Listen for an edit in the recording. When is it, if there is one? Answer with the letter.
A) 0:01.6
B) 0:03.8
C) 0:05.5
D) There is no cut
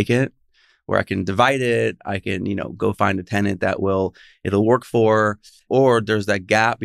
C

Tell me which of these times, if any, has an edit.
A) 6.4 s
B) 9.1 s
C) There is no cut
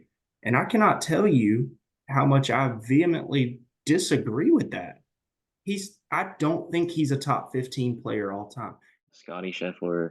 B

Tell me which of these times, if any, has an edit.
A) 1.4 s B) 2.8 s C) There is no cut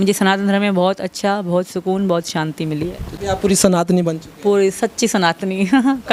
C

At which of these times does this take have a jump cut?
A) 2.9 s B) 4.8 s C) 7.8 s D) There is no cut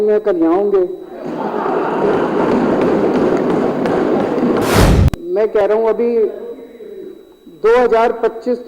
B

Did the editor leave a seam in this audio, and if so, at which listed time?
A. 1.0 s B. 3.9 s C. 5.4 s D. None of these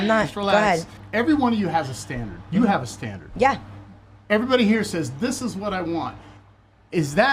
A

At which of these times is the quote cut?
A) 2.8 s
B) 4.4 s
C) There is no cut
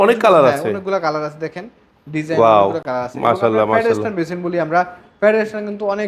C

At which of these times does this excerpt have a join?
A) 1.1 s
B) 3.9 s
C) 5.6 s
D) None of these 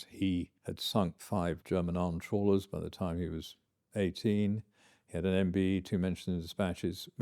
A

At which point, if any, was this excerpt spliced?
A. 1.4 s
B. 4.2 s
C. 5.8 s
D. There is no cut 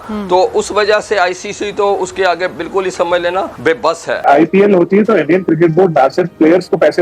B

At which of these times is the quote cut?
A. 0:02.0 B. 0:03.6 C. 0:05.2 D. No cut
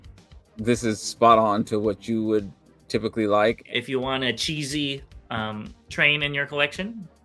B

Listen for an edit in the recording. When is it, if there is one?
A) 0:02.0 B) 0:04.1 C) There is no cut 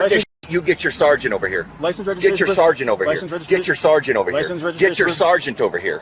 A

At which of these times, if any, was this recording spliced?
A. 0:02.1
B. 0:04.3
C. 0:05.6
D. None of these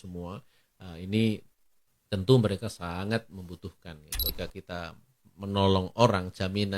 B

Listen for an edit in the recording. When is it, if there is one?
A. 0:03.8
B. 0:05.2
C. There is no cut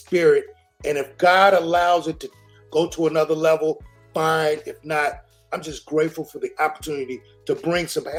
C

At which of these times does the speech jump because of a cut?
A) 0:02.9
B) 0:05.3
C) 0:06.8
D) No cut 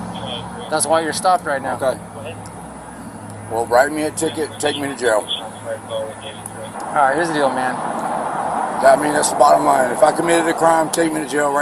C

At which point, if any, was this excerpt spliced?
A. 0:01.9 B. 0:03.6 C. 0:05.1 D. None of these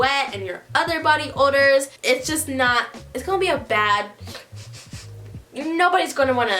A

